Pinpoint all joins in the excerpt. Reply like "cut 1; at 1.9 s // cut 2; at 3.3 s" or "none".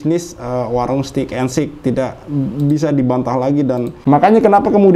cut 1; at 3.9 s